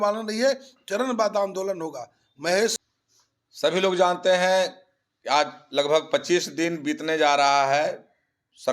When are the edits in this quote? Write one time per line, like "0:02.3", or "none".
0:02.8